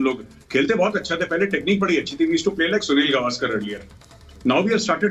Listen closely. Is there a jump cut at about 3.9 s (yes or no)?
no